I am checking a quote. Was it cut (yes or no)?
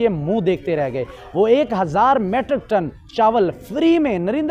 no